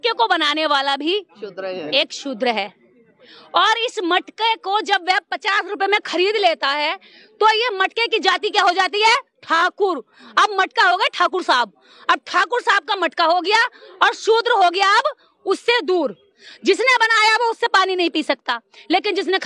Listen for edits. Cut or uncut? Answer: uncut